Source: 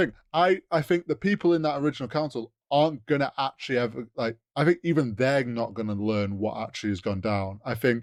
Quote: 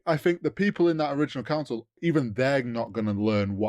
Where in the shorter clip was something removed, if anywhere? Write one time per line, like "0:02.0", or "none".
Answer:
0:02.0